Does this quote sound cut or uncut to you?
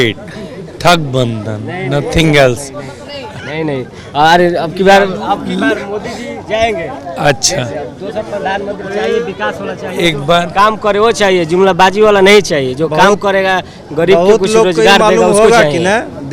uncut